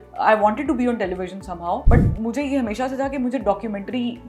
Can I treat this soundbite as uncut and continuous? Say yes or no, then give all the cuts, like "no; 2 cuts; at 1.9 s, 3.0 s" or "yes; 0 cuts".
no; 1 cut; at 1.8 s